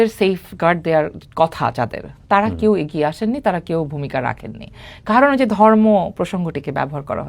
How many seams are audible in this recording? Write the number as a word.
zero